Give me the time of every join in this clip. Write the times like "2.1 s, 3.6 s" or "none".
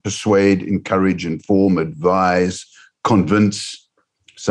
none